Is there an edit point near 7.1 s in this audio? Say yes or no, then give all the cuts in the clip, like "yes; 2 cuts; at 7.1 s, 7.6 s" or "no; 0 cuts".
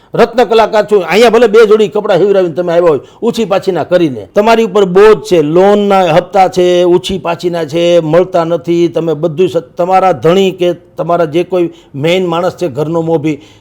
no; 1 cut; at 4.2 s